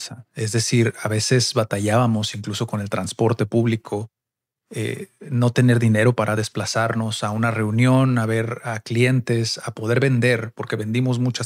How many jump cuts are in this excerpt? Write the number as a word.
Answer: zero